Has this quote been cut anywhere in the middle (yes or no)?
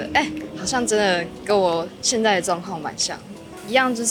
no